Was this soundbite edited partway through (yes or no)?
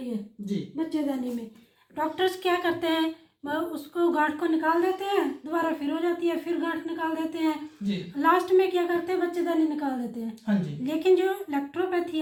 no